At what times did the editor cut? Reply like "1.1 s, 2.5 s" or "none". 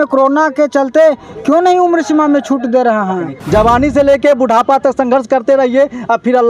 3.3 s